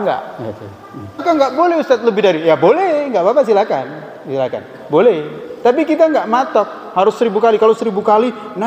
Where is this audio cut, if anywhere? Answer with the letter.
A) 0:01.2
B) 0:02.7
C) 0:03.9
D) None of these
A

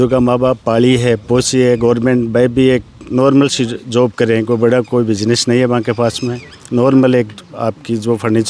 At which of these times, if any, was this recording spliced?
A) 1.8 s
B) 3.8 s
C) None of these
C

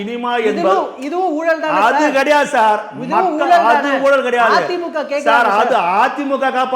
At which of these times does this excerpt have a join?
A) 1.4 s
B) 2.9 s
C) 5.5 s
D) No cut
D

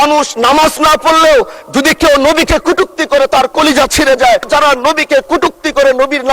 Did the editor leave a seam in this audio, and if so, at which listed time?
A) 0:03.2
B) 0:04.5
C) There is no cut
B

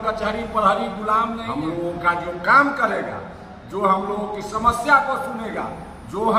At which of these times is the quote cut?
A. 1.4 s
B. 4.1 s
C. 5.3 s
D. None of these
A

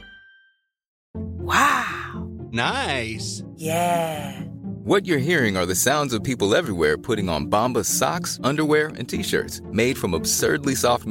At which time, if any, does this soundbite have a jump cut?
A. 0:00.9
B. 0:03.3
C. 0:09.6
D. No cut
A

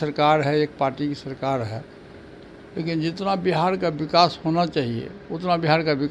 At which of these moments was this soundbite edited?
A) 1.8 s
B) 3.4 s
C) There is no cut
C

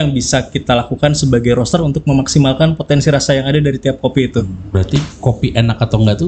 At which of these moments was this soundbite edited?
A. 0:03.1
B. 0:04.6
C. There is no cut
B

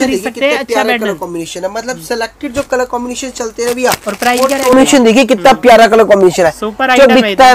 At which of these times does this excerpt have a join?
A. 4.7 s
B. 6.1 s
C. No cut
A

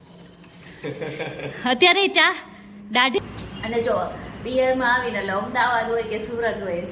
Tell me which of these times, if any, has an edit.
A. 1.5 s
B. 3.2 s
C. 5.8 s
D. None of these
B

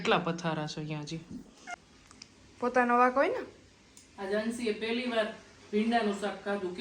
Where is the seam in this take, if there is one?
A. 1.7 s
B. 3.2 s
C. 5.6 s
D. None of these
A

